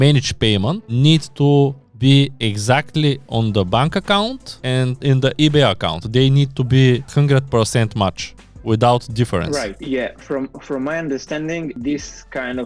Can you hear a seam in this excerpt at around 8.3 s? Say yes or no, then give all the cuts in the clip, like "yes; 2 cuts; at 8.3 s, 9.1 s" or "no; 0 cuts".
no; 0 cuts